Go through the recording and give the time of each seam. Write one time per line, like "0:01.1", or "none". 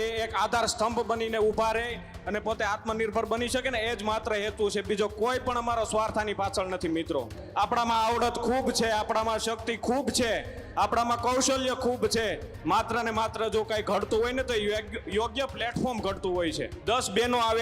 0:07.4
0:16.7